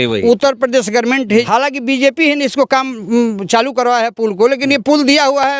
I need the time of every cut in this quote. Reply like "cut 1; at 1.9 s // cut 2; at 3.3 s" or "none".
cut 1; at 1.5 s

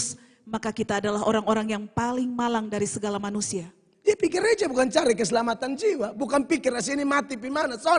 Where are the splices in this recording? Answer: none

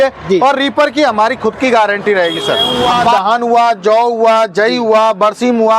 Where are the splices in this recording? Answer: cut 1; at 3.2 s

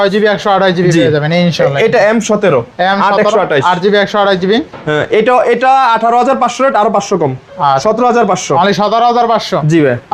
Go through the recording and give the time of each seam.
none

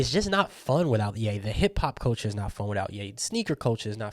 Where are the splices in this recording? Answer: cut 1; at 1.3 s

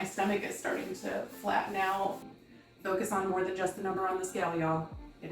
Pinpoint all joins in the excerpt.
cut 1; at 2.3 s

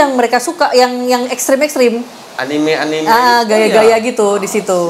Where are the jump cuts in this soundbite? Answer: none

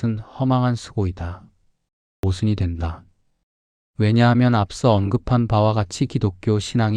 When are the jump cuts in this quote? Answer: cut 1; at 2.2 s

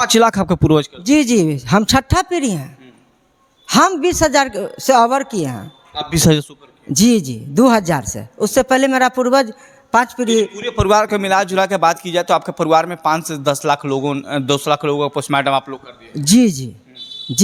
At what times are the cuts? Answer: none

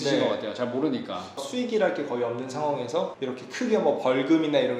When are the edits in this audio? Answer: cut 1; at 1.4 s

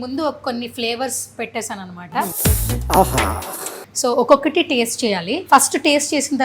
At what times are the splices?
cut 1; at 2.3 s // cut 2; at 3.8 s // cut 3; at 5.3 s

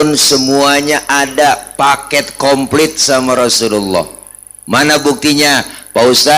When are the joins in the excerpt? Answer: none

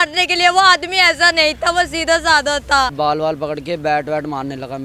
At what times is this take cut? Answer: cut 1; at 2.9 s

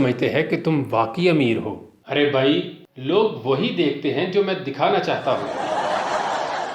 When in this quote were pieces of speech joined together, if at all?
cut 1; at 5.7 s

